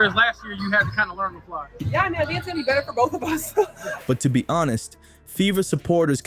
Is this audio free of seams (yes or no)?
yes